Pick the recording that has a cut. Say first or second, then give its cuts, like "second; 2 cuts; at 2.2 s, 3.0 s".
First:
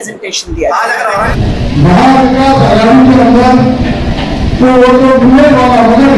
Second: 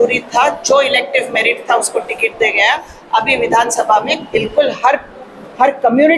first; 1 cut; at 1.3 s